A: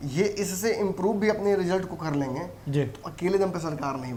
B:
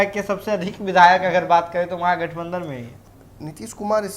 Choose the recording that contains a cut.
B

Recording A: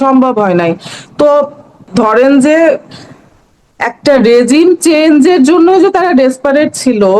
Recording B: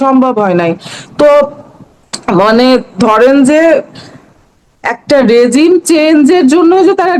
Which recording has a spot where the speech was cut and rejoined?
A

